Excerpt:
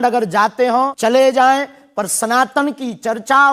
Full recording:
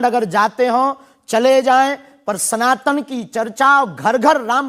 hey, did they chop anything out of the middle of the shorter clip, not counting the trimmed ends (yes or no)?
yes